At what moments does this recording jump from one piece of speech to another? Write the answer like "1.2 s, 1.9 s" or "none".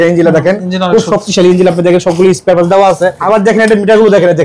3.2 s